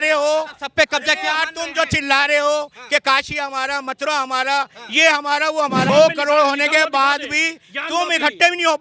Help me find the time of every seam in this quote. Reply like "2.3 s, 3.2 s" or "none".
5.9 s